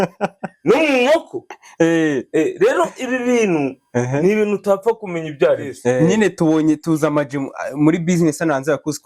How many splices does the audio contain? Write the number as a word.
one